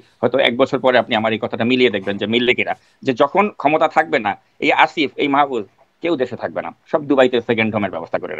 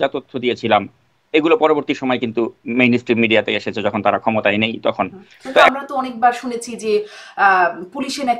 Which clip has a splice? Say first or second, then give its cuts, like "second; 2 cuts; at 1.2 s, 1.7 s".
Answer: second; 1 cut; at 5.7 s